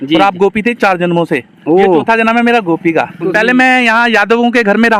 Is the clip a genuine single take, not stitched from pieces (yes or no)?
no